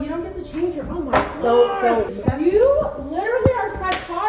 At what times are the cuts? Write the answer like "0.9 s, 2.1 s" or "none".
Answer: 2.2 s